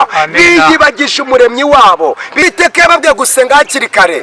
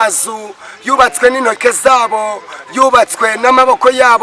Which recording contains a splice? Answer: first; 1 cut; at 2.4 s

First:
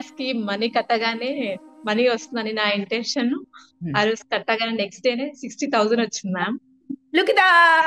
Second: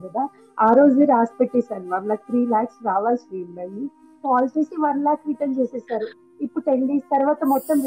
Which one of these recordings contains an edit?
second; 1 cut; at 4.1 s

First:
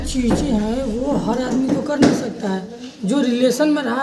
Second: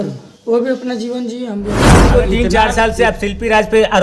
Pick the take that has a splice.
second; 1 cut; at 2.1 s

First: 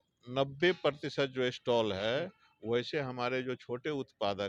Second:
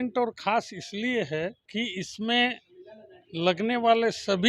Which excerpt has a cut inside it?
second; 1 cut; at 1.6 s

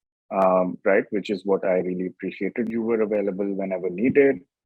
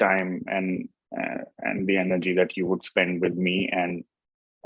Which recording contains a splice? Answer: first; 1 cut; at 2.7 s

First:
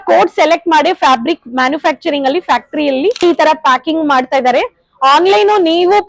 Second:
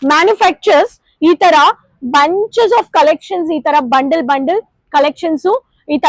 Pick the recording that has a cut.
first; 1 cut; at 3.2 s

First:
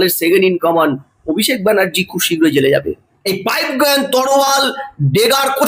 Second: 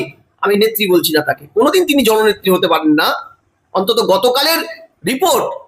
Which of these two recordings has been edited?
first; 1 cut; at 3.1 s

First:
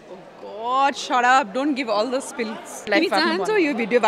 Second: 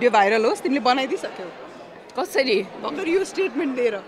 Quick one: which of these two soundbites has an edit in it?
first; 1 cut; at 2.8 s

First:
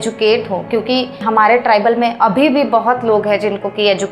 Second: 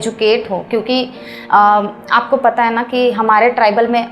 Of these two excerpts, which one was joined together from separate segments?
first; 1 cut; at 1.2 s

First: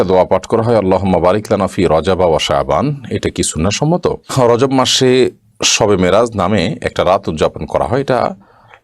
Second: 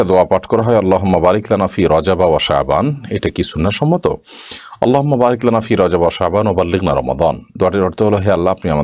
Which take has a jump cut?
first; 1 cut; at 4.3 s

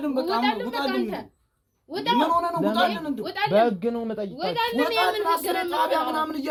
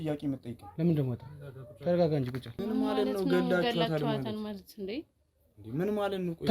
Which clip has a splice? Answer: second; 1 cut; at 2.5 s

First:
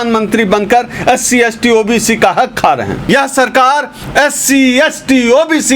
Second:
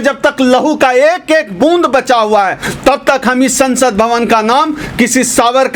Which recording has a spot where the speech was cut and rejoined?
first; 1 cut; at 3.0 s

